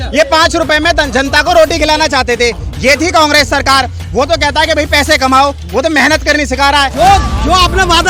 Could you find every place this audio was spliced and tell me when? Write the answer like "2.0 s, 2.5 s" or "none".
6.9 s